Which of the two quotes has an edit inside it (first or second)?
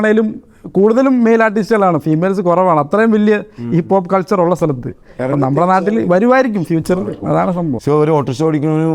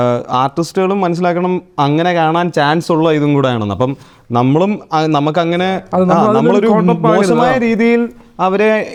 first